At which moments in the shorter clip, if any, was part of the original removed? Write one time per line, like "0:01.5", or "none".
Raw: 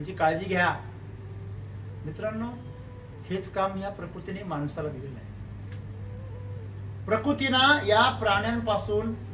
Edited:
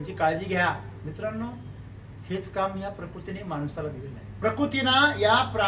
0:00.9
0:04.3